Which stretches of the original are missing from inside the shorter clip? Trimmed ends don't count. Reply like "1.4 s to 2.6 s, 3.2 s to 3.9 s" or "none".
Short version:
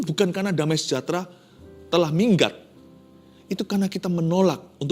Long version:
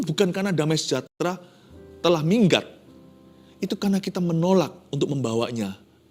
1.0 s to 1.2 s